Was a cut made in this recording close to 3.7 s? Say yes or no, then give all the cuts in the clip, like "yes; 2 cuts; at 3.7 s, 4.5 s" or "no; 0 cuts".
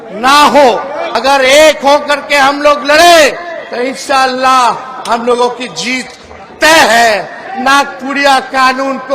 no; 2 cuts; at 1.1 s, 7.5 s